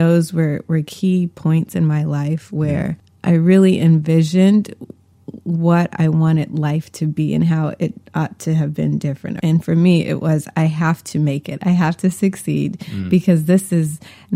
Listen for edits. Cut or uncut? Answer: cut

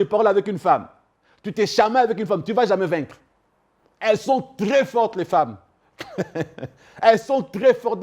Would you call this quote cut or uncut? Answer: uncut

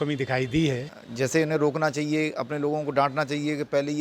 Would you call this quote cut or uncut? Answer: cut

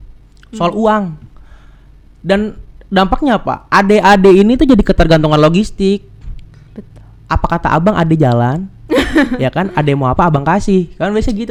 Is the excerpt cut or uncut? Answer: uncut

